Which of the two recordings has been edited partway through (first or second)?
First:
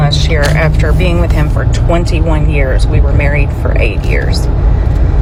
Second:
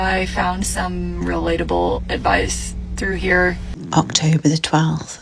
second